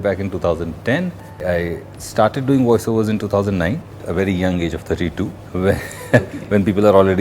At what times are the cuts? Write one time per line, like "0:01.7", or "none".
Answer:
0:01.4
0:04.0
0:05.4